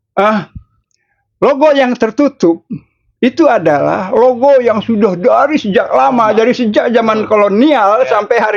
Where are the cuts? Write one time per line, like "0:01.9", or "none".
none